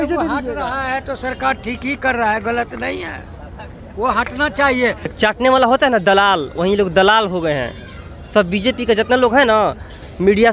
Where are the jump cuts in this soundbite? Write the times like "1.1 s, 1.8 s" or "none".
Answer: 5.1 s